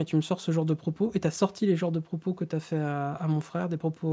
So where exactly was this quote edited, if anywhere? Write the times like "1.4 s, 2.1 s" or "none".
none

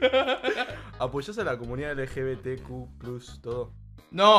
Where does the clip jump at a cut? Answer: none

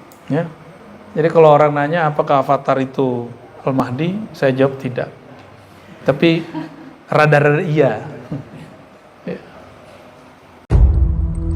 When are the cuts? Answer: 10.6 s

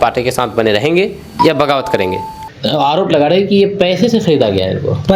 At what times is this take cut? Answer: 2.5 s

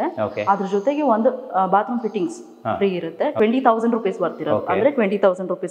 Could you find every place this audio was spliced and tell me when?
none

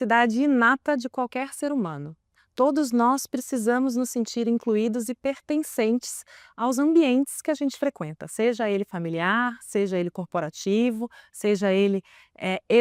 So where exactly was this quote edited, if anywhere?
none

